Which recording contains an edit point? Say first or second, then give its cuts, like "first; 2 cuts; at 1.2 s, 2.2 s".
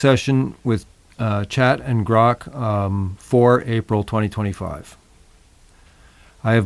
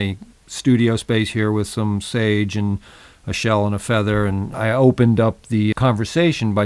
second; 2 cuts; at 4.5 s, 5.7 s